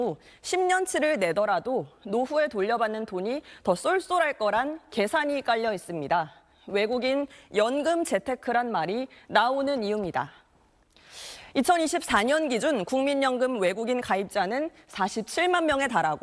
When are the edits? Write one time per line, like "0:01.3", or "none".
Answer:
none